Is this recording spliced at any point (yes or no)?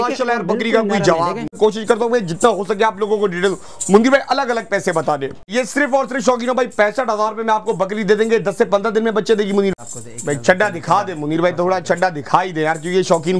yes